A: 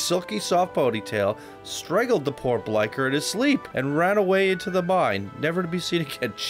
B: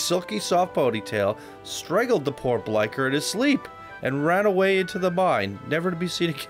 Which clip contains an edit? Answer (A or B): A